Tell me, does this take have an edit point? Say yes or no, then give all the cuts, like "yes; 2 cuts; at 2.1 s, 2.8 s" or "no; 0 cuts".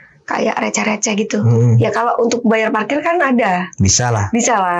no; 0 cuts